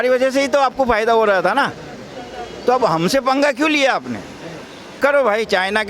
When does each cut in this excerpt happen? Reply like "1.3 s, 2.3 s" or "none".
4.9 s